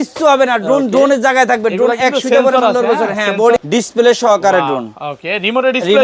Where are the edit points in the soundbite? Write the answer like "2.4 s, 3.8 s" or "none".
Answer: 3.6 s